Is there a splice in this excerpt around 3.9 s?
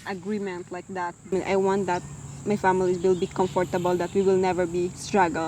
no; 1 cut; at 1.3 s

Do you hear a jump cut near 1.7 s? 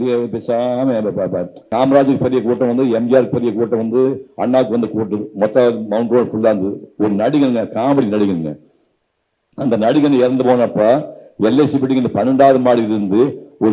yes; 1 cut; at 1.7 s

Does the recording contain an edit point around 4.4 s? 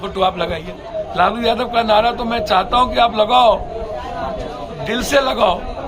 no; 1 cut; at 0.9 s

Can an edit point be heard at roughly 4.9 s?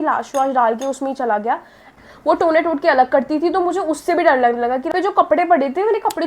yes; 2 cuts; at 2.0 s, 4.9 s

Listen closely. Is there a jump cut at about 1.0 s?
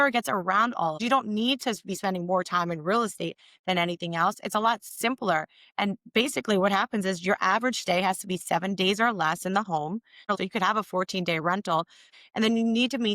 yes; 3 cuts; at 1.0 s, 10.3 s, 12.1 s

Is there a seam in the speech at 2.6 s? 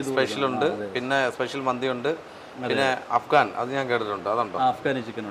no; 0 cuts

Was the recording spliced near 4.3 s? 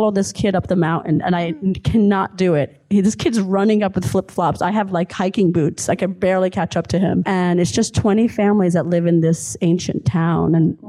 no; 1 cut; at 7.2 s

